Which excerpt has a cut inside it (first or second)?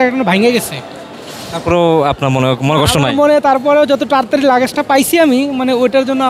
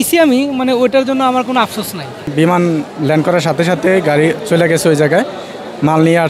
second